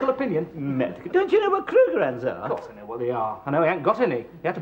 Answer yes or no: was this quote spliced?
no